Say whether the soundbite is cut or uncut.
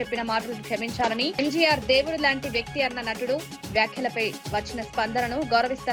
uncut